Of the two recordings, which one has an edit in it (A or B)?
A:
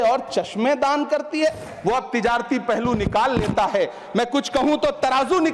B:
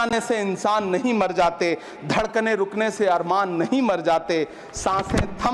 A